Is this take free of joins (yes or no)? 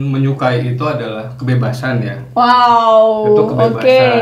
yes